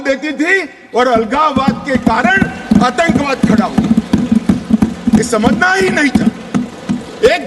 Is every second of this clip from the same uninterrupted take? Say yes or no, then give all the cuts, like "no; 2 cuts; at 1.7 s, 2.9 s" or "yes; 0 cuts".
yes; 0 cuts